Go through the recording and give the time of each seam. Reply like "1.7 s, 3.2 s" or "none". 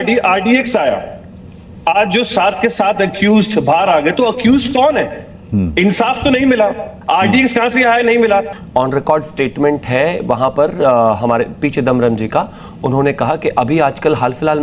8.6 s